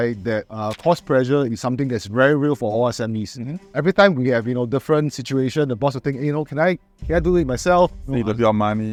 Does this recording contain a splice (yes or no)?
no